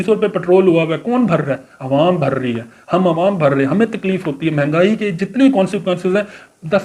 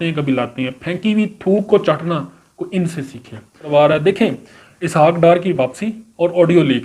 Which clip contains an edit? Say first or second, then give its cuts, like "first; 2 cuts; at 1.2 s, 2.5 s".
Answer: second; 1 cut; at 3.7 s